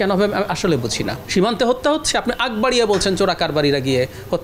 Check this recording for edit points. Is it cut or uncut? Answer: cut